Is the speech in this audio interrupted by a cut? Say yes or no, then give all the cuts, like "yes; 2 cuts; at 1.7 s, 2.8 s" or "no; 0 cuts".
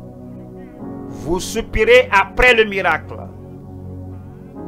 no; 0 cuts